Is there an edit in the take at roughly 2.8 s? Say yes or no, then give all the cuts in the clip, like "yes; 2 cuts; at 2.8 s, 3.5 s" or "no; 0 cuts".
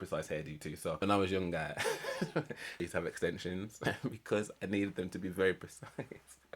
yes; 3 cuts; at 1.0 s, 2.8 s, 3.7 s